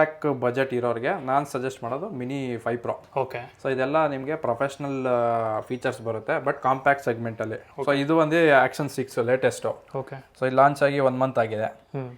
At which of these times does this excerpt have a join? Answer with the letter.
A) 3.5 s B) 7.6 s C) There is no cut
B